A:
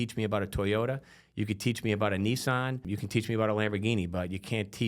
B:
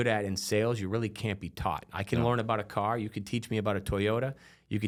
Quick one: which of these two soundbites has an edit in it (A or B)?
A